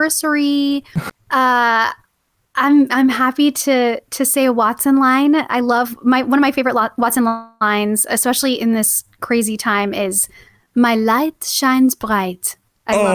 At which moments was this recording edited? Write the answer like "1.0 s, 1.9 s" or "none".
1.0 s